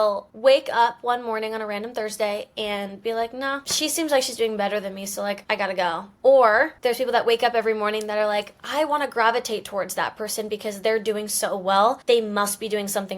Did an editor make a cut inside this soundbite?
no; 0 cuts

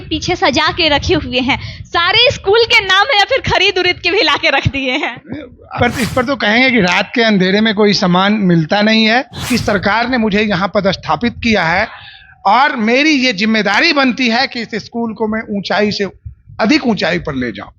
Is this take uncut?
no; 2 cuts; at 5.6 s, 9.4 s

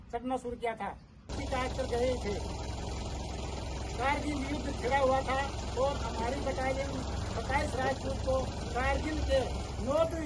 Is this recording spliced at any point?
yes; 1 cut; at 1.3 s

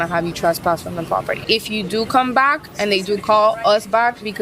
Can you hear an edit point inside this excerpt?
yes; 1 cut; at 1.4 s

